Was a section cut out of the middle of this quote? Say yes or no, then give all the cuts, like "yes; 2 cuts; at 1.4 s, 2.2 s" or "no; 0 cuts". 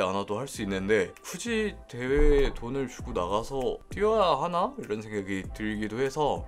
no; 0 cuts